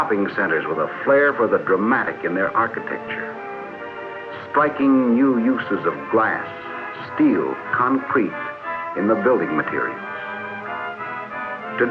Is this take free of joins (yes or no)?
no